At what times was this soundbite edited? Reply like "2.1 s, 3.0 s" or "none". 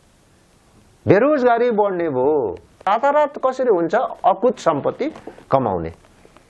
2.9 s